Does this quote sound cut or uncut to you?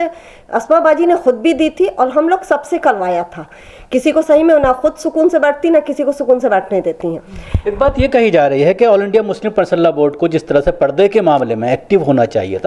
uncut